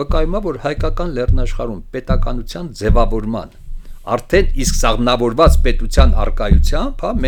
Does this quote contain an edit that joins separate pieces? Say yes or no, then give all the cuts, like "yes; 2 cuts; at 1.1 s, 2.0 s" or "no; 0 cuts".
no; 0 cuts